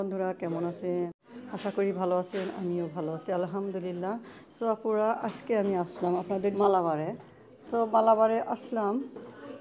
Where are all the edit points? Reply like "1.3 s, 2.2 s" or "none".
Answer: 1.2 s, 6.5 s